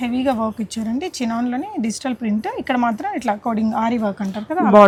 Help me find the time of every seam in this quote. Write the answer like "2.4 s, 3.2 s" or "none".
none